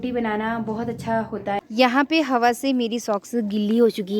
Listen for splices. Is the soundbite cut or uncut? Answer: cut